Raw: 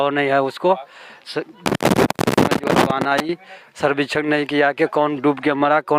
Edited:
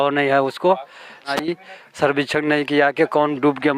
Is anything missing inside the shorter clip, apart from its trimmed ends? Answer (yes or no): yes